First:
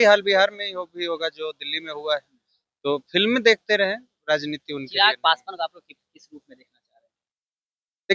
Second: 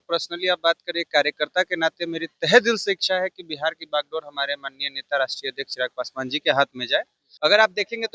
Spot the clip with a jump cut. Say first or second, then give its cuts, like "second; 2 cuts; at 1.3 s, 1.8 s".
second; 1 cut; at 7.2 s